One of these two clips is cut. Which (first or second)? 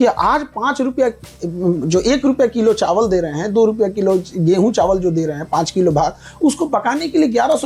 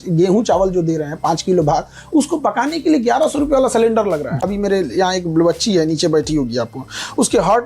second